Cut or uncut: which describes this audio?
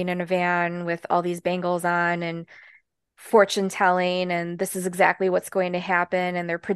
uncut